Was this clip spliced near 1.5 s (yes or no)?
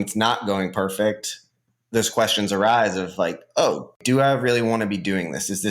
no